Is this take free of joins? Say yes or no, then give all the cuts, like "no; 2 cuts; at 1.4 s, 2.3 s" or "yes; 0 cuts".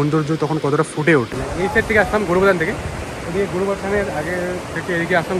no; 1 cut; at 1.3 s